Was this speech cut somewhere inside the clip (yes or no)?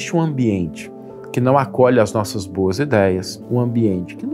yes